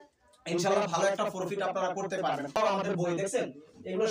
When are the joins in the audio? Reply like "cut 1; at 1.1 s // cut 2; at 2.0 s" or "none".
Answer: cut 1; at 2.6 s